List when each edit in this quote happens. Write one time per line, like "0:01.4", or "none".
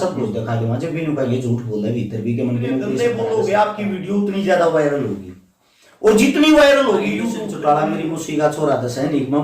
0:03.0
0:07.5